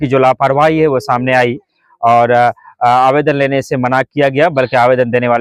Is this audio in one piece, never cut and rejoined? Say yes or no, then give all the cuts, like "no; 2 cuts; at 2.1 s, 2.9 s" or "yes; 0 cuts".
yes; 0 cuts